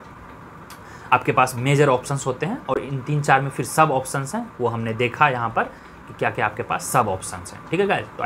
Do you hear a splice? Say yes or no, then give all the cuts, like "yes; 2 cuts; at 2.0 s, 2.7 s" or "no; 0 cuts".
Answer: no; 0 cuts